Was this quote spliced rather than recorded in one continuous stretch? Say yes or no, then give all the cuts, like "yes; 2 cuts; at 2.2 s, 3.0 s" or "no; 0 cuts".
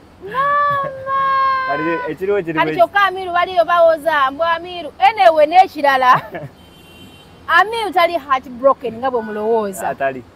no; 0 cuts